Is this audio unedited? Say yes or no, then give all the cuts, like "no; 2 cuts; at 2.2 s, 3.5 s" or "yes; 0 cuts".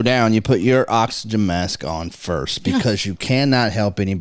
yes; 0 cuts